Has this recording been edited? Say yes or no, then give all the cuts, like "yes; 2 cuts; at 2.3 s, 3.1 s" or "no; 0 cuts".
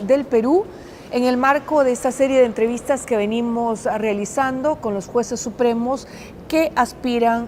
no; 0 cuts